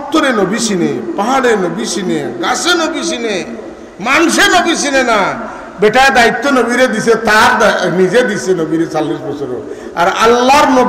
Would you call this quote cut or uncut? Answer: uncut